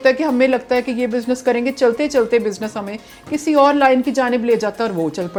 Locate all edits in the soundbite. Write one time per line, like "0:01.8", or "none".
none